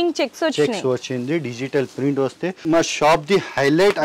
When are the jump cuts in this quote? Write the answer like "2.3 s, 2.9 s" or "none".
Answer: 2.6 s